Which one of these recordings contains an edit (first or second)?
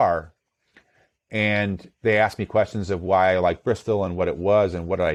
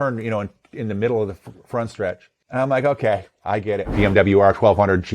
second